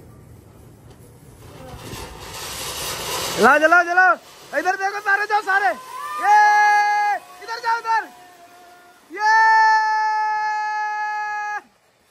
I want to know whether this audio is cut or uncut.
uncut